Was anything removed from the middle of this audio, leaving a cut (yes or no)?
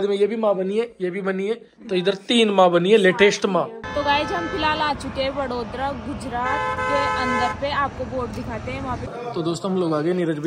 yes